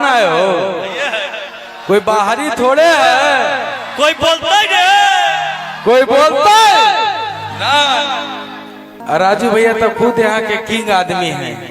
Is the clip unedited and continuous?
no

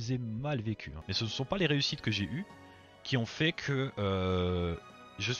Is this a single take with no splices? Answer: no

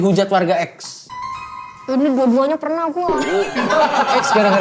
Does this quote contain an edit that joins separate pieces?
no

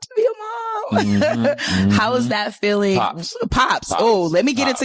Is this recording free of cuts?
yes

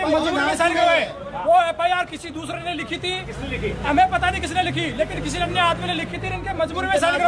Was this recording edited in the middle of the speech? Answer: no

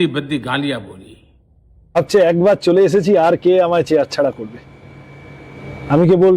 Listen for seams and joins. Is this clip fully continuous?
no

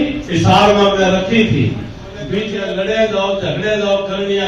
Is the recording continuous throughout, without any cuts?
no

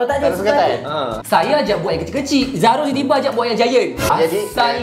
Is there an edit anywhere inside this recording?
yes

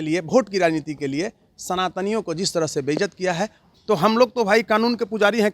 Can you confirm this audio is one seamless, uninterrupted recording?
no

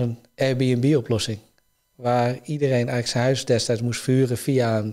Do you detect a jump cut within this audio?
no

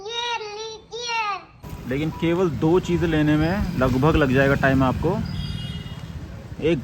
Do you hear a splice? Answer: yes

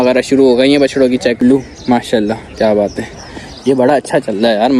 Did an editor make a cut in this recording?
yes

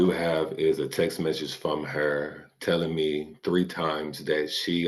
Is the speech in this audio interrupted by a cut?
no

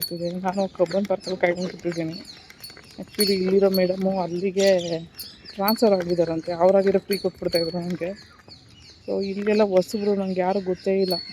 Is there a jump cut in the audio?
no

